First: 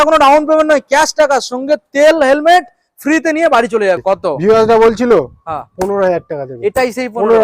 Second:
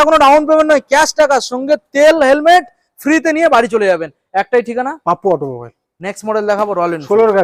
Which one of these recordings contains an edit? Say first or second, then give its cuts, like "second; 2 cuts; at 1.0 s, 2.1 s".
first; 1 cut; at 4.0 s